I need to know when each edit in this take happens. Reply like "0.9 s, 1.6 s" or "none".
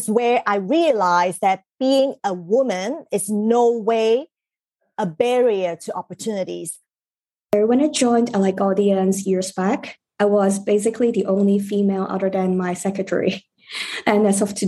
6.8 s